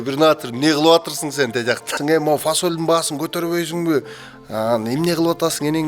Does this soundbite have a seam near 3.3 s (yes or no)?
no